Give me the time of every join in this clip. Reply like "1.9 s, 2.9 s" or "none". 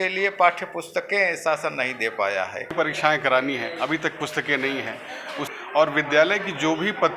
2.7 s, 5.4 s